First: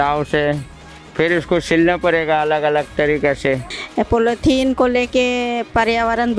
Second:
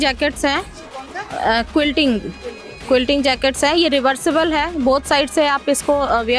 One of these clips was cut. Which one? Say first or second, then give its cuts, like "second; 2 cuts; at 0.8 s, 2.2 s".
first; 1 cut; at 3.8 s